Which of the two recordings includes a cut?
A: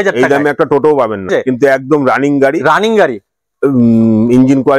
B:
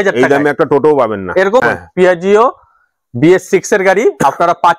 B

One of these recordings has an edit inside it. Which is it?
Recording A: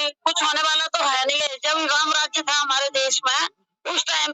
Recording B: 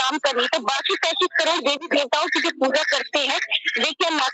A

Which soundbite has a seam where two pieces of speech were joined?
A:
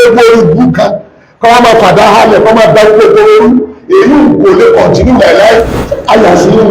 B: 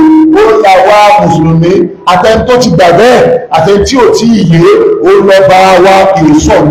A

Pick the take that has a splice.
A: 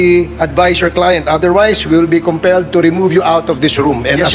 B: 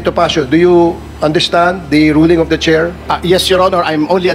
B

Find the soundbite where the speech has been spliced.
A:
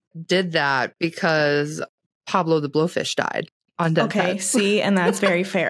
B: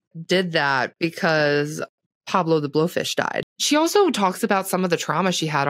B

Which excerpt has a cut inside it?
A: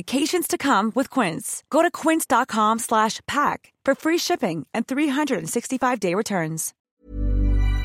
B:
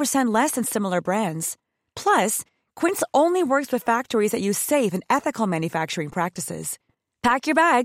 A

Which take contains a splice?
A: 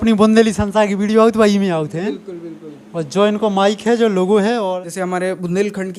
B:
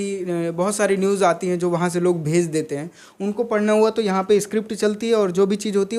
A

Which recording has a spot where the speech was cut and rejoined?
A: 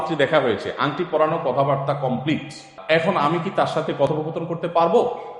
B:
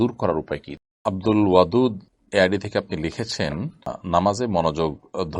B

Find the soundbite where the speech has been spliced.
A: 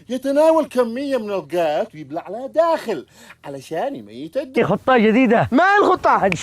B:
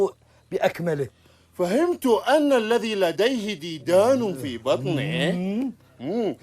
A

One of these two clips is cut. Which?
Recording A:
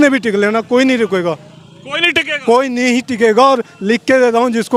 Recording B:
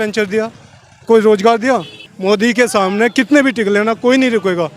B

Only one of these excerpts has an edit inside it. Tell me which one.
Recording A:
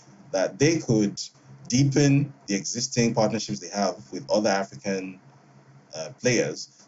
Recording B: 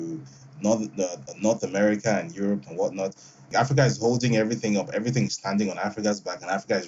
B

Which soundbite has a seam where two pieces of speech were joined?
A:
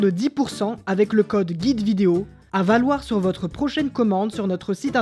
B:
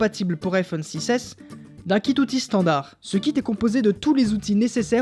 A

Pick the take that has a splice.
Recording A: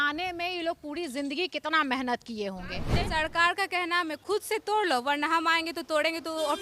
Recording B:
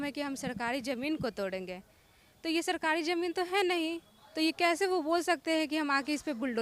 A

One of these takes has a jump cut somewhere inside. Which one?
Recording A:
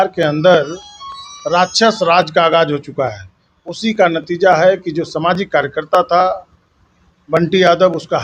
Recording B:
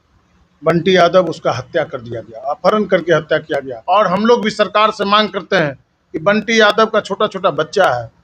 B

